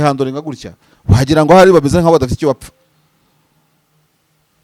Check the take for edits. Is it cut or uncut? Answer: uncut